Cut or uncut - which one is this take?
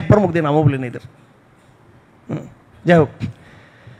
uncut